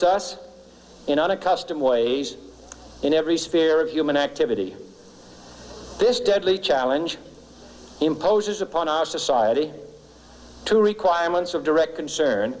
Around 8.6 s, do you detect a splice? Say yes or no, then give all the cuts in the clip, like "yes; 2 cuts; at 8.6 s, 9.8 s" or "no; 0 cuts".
yes; 1 cut; at 8.6 s